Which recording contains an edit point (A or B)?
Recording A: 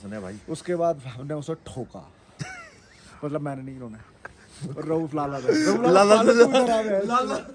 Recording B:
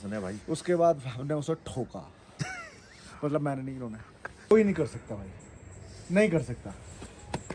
B